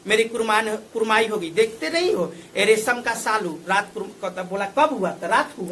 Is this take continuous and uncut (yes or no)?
yes